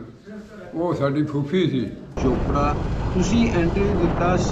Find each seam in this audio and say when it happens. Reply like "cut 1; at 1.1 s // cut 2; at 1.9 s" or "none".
cut 1; at 2.2 s